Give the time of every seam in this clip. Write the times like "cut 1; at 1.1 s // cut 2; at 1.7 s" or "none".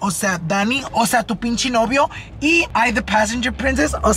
cut 1; at 2.7 s